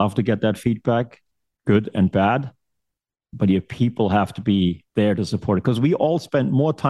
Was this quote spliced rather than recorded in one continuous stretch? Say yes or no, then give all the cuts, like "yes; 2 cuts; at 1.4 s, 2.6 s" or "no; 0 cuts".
yes; 1 cut; at 4.8 s